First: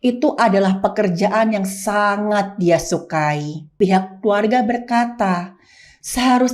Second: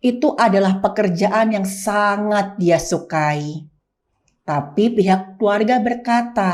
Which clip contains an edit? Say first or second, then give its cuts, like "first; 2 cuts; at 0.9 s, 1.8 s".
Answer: first; 1 cut; at 3.8 s